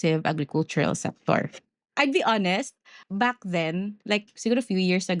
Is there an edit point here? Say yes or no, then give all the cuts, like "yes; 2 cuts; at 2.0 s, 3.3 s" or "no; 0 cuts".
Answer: yes; 2 cuts; at 1.8 s, 3.0 s